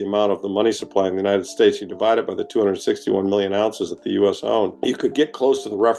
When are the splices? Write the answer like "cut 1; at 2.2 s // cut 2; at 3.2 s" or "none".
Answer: cut 1; at 4.8 s